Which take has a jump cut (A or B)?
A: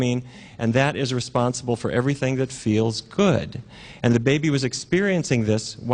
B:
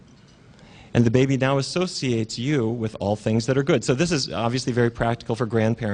A